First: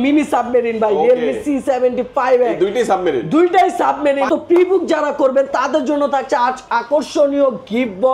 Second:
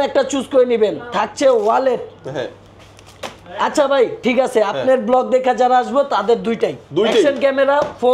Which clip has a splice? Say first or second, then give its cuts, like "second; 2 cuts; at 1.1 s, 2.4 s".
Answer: first; 1 cut; at 4.3 s